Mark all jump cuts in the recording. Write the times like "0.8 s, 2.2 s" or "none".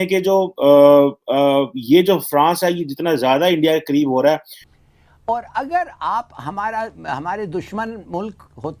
4.6 s